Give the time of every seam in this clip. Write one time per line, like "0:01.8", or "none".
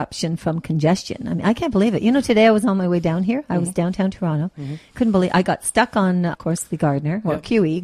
0:06.4